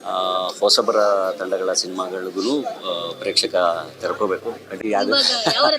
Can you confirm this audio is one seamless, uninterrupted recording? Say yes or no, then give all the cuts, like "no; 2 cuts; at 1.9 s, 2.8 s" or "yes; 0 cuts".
no; 1 cut; at 4.7 s